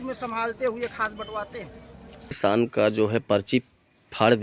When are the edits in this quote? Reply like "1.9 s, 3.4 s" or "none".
2.3 s